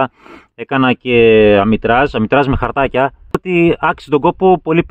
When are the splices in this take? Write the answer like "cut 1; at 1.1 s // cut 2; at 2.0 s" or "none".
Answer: cut 1; at 3.4 s